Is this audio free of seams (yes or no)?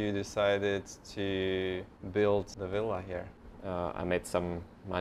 no